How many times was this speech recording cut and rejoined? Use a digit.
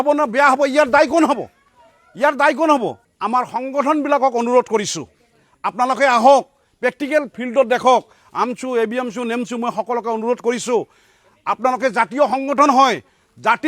1